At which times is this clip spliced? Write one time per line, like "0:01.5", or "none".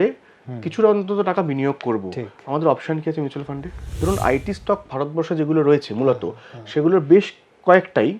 0:04.0